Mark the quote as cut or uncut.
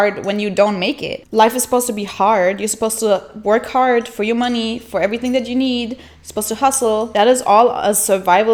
uncut